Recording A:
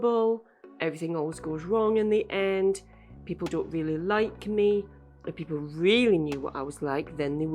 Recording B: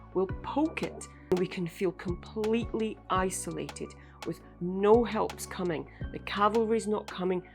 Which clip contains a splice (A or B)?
B